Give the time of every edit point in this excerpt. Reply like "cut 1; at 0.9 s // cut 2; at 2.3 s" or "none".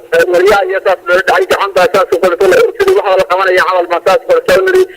cut 1; at 2.9 s